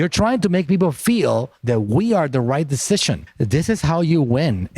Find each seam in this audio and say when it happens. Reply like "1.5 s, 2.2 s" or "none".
3.3 s